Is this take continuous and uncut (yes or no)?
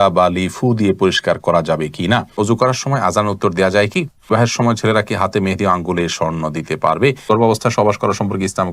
no